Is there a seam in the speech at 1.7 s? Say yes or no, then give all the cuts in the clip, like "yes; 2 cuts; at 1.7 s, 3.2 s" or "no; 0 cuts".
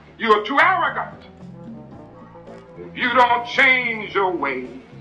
no; 0 cuts